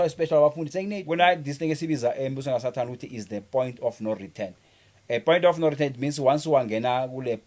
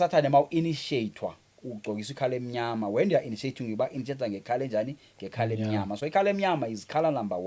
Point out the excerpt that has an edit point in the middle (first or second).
first